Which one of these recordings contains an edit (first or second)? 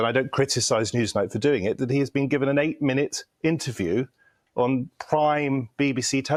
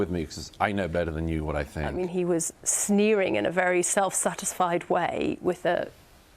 second